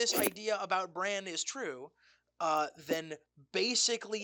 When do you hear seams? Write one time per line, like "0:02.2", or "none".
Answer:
none